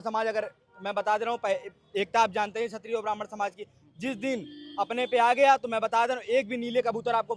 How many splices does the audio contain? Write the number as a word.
zero